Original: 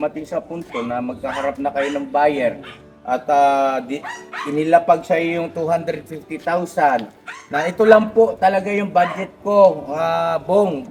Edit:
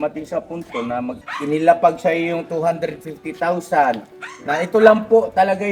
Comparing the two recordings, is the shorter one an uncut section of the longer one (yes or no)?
no